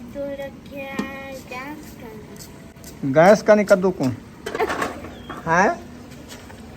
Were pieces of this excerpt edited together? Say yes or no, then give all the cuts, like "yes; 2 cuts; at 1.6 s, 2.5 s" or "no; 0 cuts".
yes; 1 cut; at 4.6 s